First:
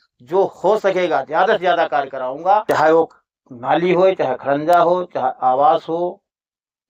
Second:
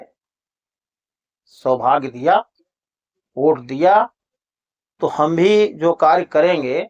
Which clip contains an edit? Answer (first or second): first